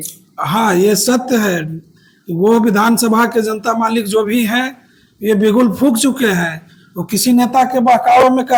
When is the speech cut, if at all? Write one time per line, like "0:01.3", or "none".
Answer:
none